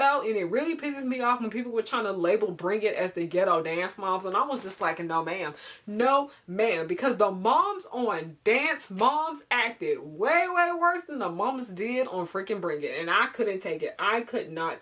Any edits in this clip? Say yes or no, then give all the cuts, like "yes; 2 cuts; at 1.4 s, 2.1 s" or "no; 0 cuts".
no; 0 cuts